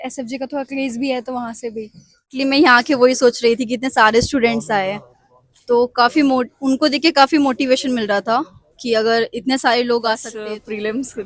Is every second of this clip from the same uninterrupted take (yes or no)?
no